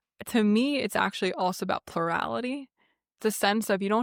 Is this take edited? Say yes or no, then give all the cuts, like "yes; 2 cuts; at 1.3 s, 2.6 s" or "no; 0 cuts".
no; 0 cuts